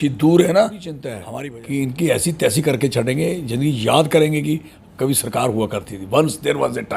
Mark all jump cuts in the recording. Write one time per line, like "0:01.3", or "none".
0:01.2